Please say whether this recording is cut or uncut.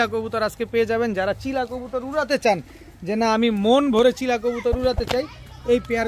uncut